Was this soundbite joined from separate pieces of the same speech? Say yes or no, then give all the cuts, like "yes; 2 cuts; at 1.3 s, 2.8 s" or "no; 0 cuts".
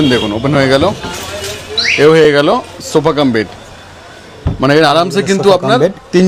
no; 0 cuts